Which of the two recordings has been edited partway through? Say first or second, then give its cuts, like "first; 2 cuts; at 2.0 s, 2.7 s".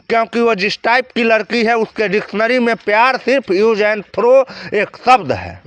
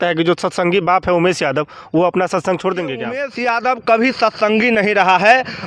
second; 1 cut; at 3.3 s